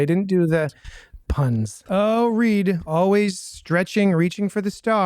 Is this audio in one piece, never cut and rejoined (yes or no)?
no